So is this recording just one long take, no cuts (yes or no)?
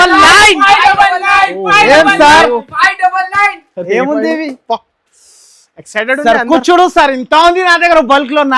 yes